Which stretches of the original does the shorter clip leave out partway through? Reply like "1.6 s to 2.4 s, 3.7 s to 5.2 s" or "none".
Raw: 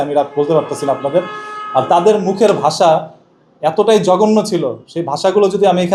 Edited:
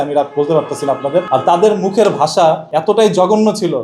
1.3 s to 1.7 s, 3.1 s to 3.6 s